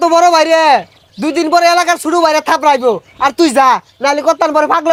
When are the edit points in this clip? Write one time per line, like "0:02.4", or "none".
none